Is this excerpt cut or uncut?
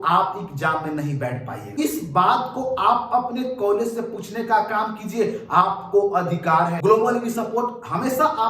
cut